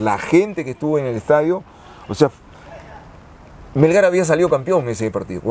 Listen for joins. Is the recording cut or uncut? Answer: uncut